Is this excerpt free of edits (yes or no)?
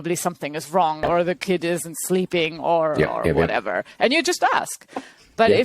no